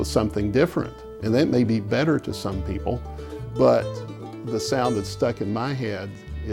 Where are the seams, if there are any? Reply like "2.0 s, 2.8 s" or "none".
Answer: 3.4 s